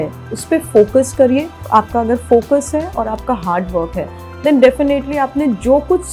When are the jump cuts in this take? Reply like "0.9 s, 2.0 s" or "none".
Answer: 1.6 s